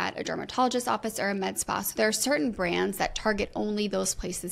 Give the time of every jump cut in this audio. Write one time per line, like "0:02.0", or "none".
none